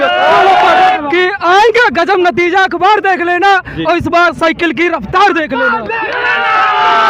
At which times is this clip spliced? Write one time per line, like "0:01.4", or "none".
0:00.9